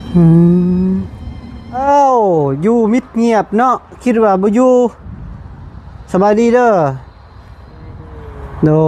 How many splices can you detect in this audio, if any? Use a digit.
1